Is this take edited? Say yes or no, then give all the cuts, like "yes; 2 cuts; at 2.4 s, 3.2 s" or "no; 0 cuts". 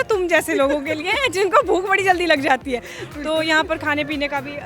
no; 0 cuts